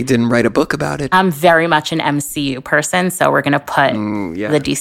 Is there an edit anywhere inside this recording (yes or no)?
yes